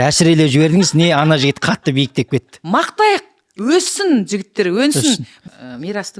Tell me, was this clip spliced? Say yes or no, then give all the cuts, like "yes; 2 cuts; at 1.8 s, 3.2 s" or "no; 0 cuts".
yes; 2 cuts; at 2.5 s, 5.3 s